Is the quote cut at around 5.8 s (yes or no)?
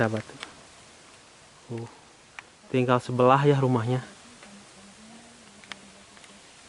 no